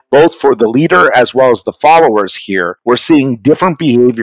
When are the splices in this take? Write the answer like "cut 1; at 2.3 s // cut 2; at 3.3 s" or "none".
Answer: cut 1; at 2.7 s